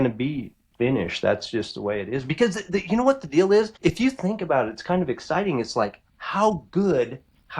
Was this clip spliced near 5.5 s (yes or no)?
no